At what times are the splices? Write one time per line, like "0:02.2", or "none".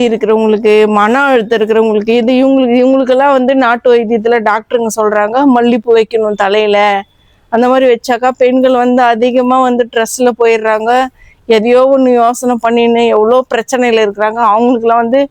none